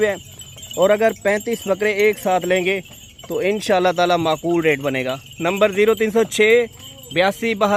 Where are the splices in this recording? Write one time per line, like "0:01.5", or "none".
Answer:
none